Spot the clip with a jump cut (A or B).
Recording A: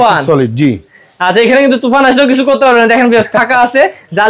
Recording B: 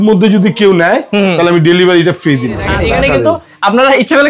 B